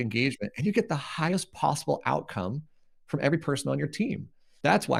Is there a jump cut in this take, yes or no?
no